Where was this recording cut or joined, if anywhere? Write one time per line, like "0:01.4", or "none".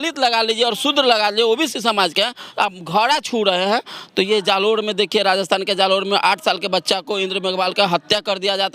none